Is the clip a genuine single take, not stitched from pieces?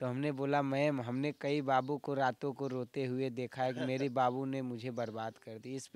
yes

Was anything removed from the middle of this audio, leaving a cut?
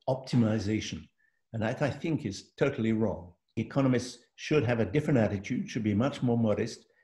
yes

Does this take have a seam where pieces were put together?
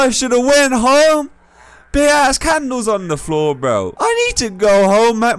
yes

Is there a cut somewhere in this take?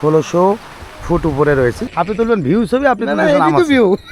yes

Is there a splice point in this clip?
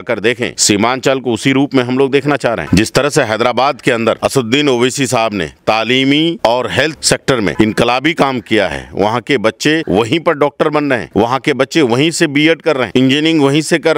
no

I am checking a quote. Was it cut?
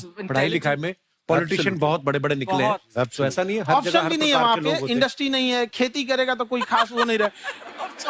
no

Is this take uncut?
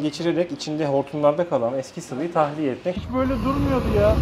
no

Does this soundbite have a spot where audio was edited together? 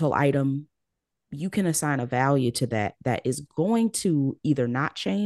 no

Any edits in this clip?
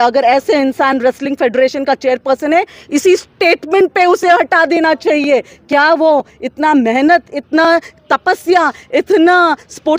no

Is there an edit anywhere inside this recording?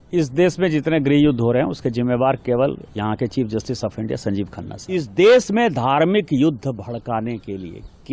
yes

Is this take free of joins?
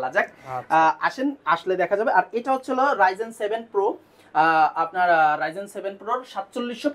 yes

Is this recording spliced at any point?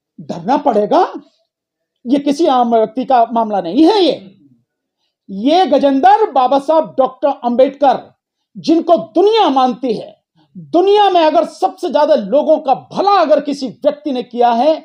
no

